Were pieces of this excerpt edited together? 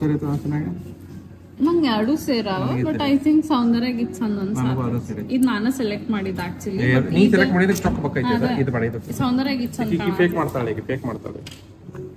no; 0 cuts

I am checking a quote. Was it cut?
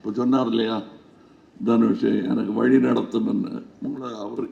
no; 0 cuts

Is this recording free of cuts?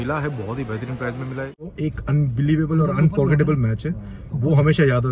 no; 1 cut; at 1.7 s

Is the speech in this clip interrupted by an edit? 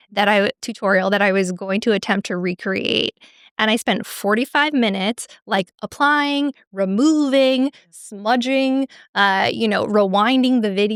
no; 0 cuts

